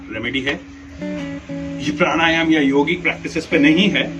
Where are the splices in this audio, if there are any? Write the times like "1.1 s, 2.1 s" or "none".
1.0 s

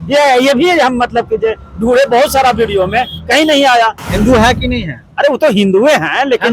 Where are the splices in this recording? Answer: 4.0 s

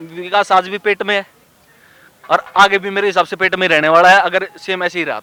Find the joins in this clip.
none

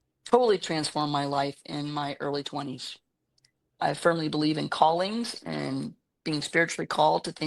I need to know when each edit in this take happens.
3.8 s

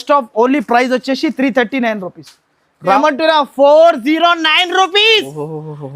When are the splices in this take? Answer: 3.0 s

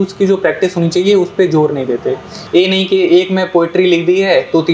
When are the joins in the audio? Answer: 2.3 s

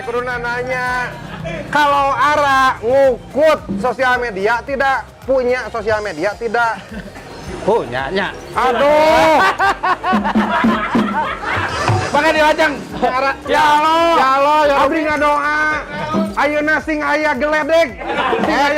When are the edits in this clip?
none

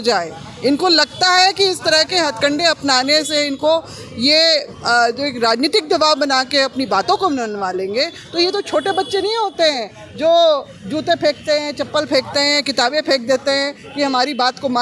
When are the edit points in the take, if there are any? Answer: none

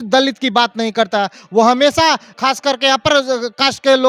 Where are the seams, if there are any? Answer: 2.3 s

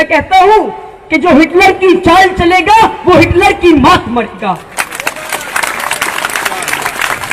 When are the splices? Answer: none

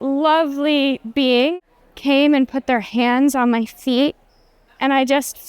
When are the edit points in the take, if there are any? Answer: 1.5 s

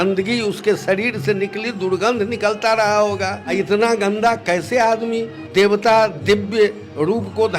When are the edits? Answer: 3.4 s, 5.4 s

